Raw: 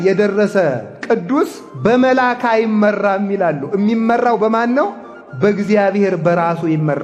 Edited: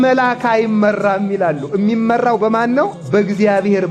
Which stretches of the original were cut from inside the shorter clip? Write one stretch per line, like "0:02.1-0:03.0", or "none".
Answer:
0:05.0-0:05.3